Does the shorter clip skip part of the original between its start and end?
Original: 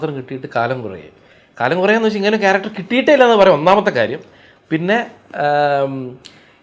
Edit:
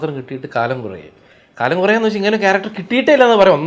no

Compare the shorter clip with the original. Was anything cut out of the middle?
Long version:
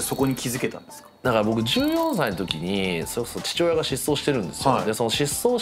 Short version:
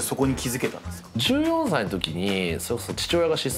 yes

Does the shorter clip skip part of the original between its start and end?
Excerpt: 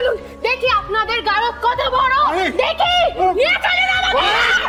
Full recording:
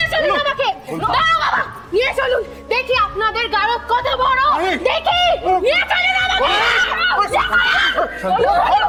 no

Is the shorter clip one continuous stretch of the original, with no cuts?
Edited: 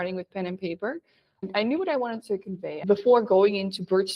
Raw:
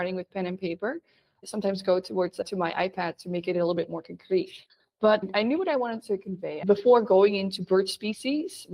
no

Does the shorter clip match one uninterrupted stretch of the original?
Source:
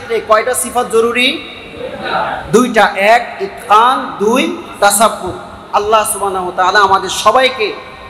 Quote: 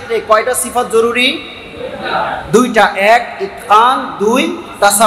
yes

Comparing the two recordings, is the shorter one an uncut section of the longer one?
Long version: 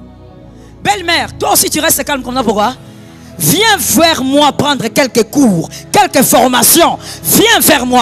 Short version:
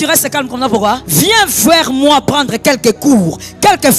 no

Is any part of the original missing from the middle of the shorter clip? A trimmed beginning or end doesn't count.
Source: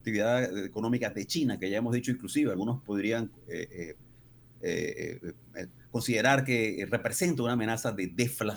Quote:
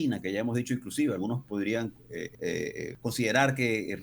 yes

